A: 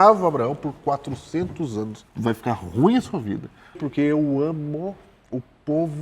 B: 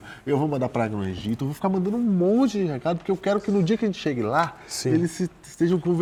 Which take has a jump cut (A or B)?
A